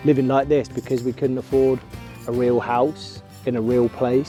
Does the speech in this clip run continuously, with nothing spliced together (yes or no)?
yes